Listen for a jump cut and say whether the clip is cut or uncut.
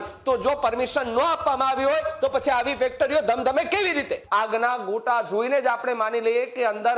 cut